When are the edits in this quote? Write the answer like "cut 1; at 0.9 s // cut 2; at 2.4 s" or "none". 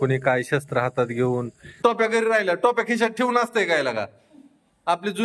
cut 1; at 1.6 s

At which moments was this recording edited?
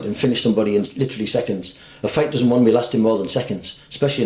none

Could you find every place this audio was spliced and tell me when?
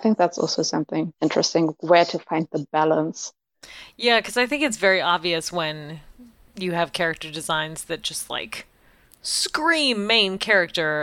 cut 1; at 1.1 s

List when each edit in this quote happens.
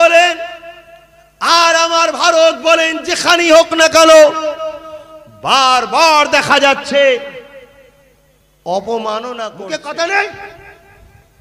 cut 1; at 9.6 s

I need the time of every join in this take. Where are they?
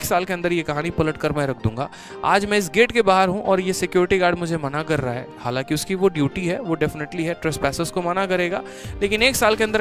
none

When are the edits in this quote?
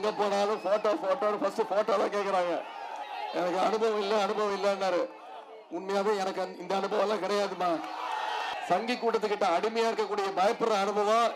cut 1; at 3.0 s // cut 2; at 8.5 s

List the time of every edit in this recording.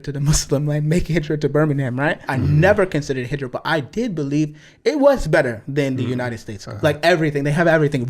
cut 1; at 2.2 s // cut 2; at 6.5 s

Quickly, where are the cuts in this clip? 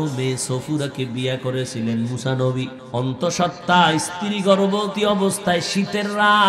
cut 1; at 2.8 s // cut 2; at 4.9 s

